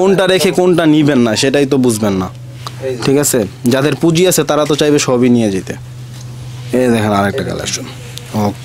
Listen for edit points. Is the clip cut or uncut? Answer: uncut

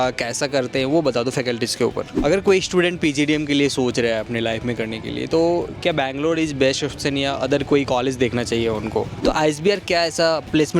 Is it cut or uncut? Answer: cut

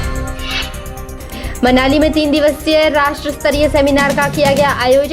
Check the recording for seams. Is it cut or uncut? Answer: uncut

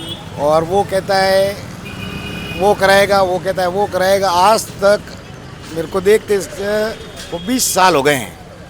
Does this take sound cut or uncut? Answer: uncut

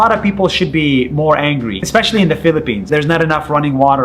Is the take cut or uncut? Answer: cut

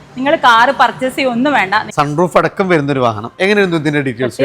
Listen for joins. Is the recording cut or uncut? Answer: cut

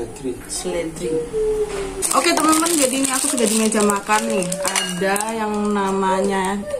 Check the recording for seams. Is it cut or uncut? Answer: cut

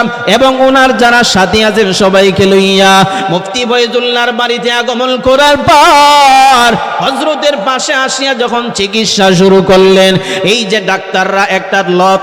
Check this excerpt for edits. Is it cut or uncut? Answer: uncut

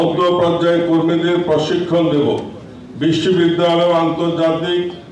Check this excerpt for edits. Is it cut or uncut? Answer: uncut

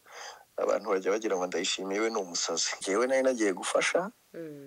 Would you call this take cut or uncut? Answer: cut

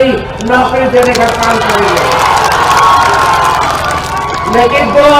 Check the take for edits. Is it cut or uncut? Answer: uncut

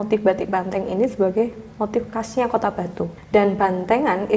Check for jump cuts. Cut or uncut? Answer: cut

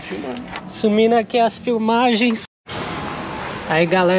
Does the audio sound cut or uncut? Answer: cut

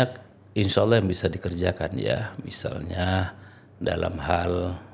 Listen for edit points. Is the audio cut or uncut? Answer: uncut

